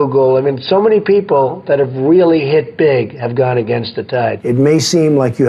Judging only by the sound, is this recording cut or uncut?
cut